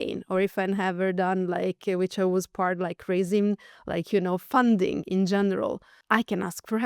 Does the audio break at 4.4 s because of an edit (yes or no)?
no